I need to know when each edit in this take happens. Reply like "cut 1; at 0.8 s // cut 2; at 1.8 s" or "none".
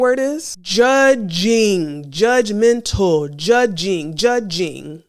none

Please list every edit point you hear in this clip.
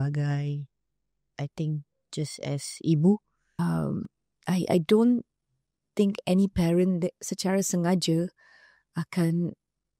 cut 1; at 3.6 s

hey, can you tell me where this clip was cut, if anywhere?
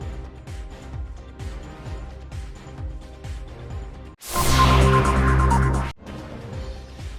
cut 1; at 5.9 s

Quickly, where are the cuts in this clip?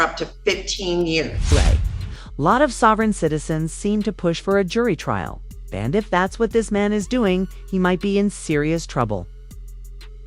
none

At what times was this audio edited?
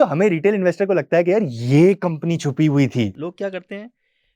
cut 1; at 3.2 s

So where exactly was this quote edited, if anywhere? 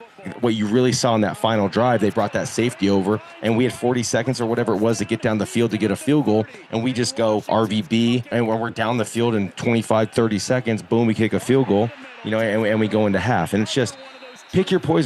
none

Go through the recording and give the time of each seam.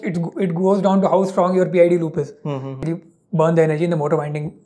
cut 1; at 2.8 s

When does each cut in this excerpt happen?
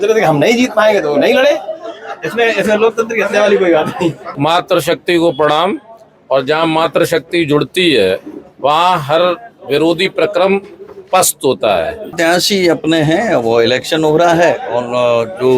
cut 1; at 4.3 s // cut 2; at 12.1 s

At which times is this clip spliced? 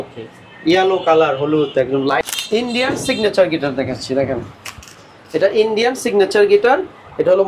cut 1; at 2.3 s

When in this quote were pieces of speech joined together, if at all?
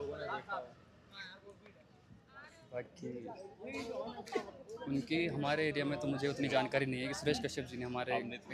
none

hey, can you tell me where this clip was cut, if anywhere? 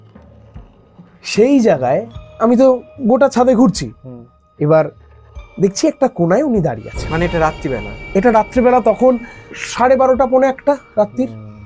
cut 1; at 9.5 s

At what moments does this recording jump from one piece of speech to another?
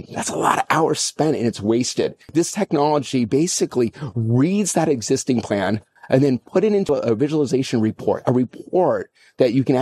cut 1; at 2.2 s // cut 2; at 5.9 s // cut 3; at 6.9 s

